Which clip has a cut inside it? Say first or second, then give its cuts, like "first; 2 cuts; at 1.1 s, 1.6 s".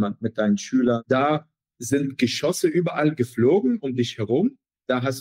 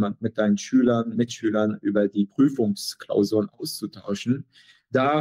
first; 1 cut; at 1.0 s